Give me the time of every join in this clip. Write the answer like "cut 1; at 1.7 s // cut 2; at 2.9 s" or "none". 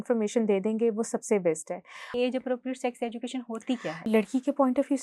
cut 1; at 2.1 s // cut 2; at 4.1 s